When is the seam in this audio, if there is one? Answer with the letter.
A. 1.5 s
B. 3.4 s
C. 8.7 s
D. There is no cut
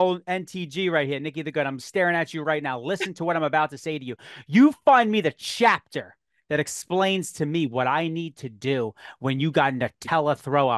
D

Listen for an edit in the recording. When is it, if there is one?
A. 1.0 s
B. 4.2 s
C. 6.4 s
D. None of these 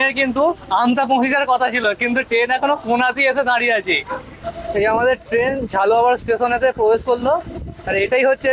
B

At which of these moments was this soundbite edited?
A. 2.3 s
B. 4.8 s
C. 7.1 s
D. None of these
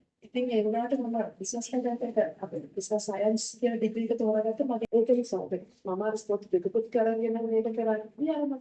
B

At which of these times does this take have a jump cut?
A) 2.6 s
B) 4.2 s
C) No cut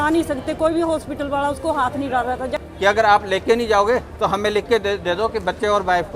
A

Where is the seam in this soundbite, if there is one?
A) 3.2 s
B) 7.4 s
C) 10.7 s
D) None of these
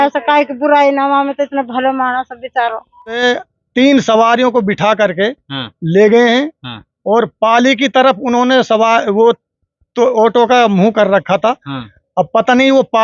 A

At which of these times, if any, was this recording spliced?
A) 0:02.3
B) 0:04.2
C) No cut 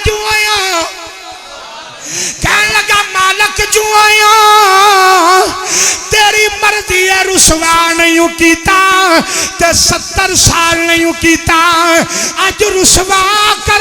A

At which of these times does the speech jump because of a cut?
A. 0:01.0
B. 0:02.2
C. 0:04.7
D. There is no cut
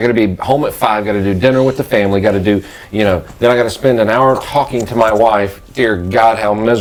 D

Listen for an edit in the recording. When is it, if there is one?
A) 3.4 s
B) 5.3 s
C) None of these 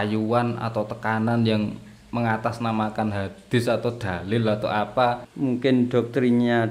B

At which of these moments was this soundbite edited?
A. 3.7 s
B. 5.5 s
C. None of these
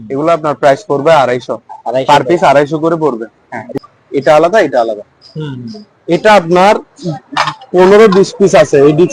A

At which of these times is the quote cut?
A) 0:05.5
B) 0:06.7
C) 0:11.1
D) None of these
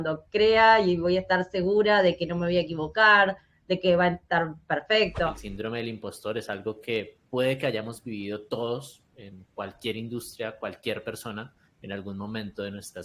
A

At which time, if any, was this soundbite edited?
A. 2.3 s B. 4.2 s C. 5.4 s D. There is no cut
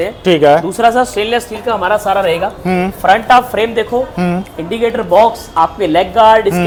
D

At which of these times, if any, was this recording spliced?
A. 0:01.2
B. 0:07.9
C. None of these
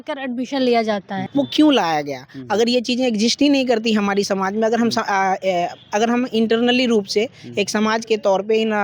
A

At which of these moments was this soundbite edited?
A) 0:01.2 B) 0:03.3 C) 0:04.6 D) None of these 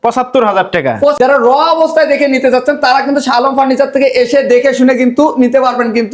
A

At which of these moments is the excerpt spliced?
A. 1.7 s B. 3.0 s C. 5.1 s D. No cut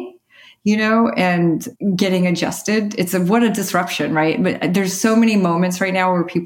A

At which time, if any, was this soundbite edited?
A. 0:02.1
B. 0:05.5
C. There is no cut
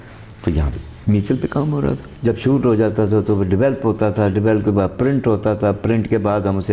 A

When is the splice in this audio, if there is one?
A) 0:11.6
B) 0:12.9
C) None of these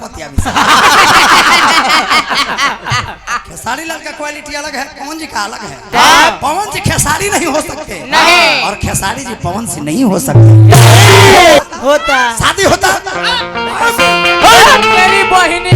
A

